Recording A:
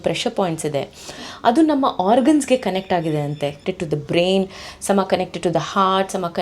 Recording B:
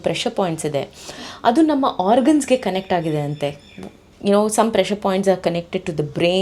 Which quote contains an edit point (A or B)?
A